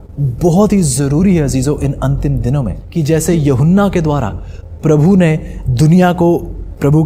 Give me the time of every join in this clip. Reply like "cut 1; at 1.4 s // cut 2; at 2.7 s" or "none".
cut 1; at 2.8 s